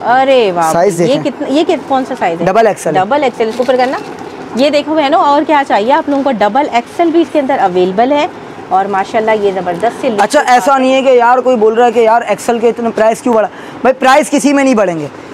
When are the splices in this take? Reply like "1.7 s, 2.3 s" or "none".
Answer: none